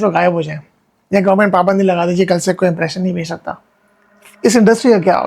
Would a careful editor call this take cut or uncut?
uncut